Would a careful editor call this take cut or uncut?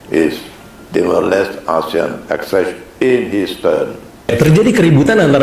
cut